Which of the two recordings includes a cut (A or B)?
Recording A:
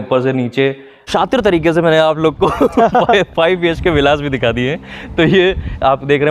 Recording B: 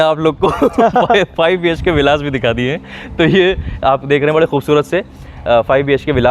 A